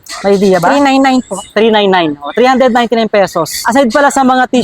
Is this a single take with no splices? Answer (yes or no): no